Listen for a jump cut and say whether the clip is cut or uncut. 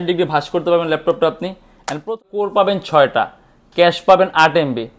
cut